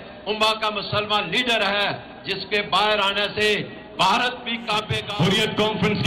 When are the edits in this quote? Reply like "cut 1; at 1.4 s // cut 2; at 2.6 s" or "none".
cut 1; at 5.0 s